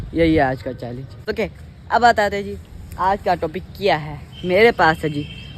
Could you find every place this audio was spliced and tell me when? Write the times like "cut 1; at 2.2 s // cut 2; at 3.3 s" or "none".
cut 1; at 1.2 s